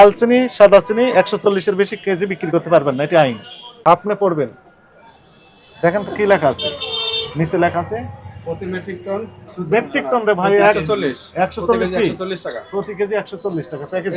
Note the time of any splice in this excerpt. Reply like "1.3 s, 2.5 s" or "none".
3.8 s